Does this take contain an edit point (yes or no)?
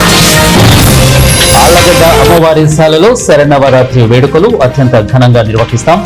yes